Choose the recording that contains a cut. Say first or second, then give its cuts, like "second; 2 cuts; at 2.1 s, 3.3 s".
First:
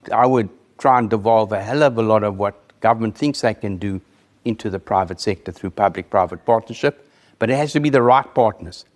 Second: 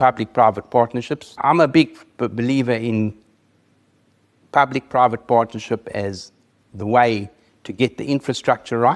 second; 1 cut; at 1.4 s